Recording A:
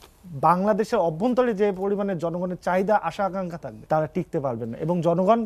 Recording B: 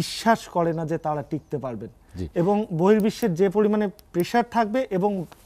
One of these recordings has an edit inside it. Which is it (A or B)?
A